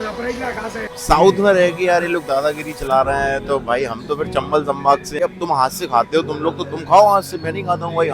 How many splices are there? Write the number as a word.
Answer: two